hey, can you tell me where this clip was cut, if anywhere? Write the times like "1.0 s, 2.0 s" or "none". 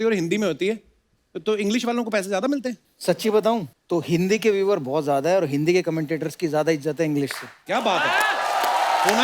2.9 s, 3.7 s